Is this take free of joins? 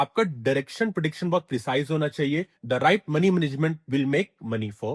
no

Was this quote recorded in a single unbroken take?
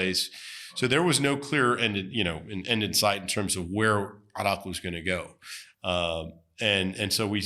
yes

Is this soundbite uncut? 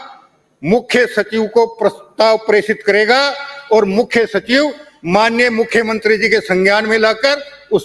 yes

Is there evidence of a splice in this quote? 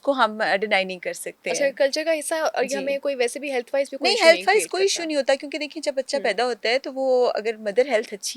no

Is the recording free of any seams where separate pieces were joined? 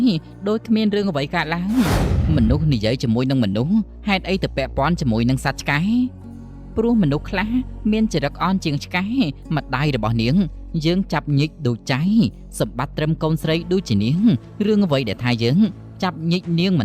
no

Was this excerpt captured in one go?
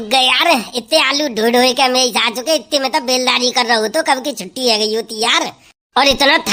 yes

